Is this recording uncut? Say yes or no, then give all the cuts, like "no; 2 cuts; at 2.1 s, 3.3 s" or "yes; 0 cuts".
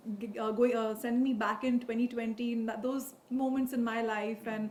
yes; 0 cuts